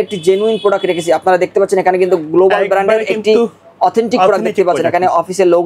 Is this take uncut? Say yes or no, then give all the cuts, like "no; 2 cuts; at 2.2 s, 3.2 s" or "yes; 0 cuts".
yes; 0 cuts